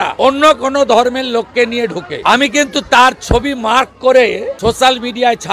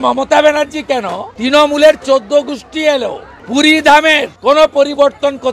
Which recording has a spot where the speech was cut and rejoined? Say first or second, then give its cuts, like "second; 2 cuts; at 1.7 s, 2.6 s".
first; 1 cut; at 2.1 s